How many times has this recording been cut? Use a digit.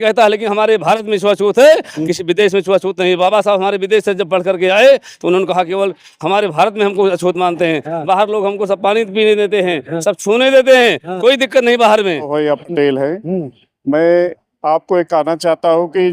1